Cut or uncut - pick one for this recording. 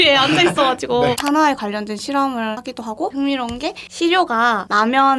cut